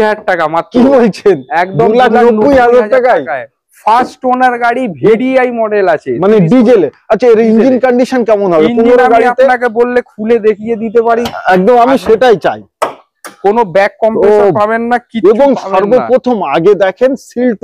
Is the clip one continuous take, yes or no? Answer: yes